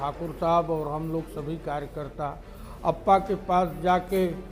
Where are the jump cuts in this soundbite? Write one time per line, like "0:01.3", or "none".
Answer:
none